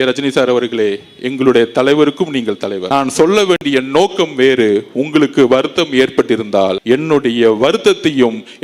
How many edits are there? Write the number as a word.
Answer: two